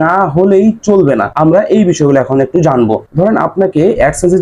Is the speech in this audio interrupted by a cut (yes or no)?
yes